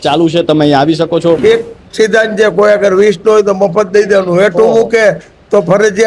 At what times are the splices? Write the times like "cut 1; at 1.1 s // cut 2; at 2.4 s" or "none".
cut 1; at 1.4 s